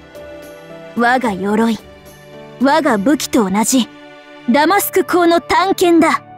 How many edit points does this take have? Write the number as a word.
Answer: one